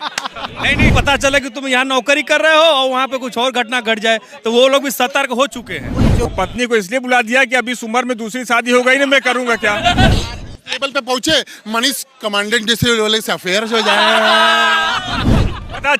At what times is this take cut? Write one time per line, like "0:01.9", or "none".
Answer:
0:00.9
0:06.2
0:10.1